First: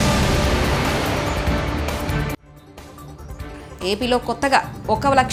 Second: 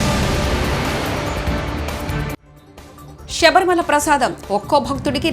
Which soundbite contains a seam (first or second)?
second